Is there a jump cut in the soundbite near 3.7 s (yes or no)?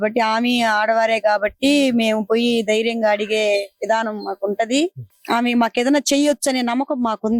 no